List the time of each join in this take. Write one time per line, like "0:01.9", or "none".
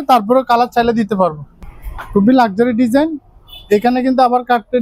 0:01.5